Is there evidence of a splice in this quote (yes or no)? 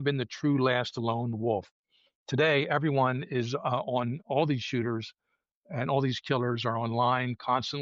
yes